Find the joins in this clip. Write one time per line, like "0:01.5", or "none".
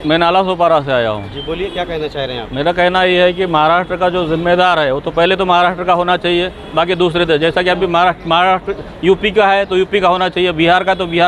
none

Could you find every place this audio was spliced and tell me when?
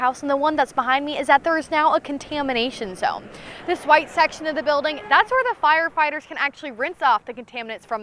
none

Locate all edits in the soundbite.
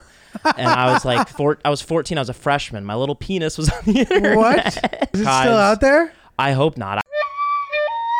0:01.3
0:05.2

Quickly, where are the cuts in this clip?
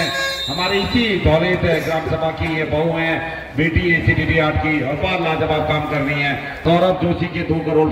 0:06.6

